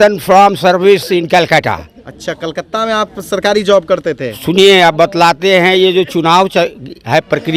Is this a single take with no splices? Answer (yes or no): yes